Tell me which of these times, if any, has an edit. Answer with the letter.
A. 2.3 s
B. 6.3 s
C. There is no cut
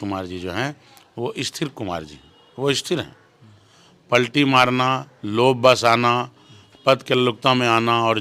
C